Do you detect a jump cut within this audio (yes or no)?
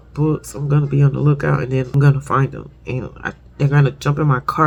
no